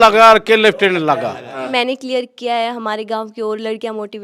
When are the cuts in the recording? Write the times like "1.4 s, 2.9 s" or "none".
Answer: 1.6 s